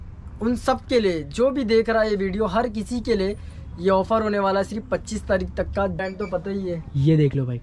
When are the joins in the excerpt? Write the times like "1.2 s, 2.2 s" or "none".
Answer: 6.0 s